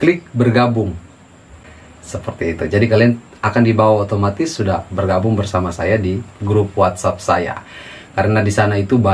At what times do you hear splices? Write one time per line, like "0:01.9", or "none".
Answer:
none